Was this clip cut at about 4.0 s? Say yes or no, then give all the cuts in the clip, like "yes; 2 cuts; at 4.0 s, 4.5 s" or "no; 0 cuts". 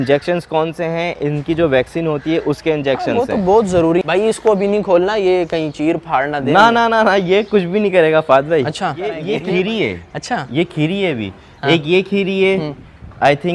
yes; 2 cuts; at 4.0 s, 9.3 s